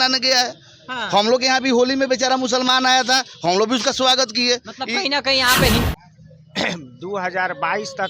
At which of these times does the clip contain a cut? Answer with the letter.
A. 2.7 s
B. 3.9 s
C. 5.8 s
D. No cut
C